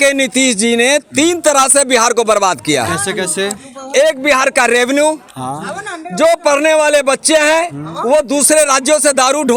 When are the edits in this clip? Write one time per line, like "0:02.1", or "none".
none